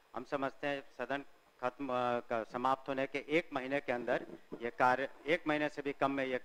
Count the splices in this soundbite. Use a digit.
0